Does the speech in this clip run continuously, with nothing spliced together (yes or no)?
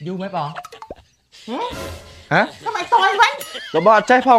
yes